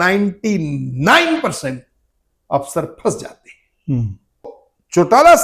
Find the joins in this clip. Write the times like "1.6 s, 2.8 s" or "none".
4.5 s